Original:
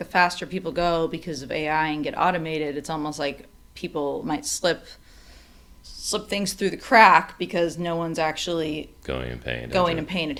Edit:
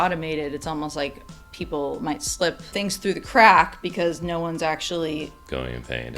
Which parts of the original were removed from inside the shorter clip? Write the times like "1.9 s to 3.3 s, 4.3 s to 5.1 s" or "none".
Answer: 4.9 s to 6.2 s